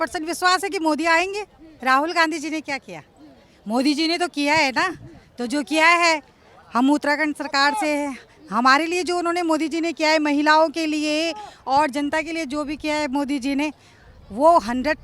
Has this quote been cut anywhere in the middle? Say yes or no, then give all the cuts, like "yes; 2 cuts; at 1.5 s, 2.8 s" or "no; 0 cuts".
yes; 1 cut; at 1.7 s